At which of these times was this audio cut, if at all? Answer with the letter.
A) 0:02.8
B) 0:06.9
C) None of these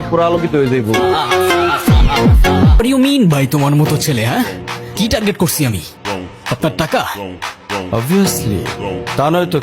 A